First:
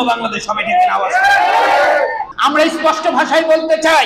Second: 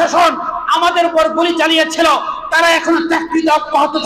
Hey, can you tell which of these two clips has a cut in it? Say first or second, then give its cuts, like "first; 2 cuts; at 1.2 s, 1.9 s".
first; 1 cut; at 2.3 s